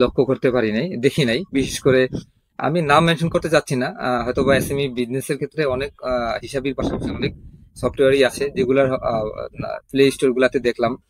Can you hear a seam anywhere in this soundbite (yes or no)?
no